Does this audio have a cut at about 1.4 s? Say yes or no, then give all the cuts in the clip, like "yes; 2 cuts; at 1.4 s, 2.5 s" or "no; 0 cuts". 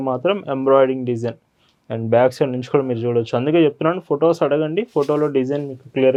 no; 0 cuts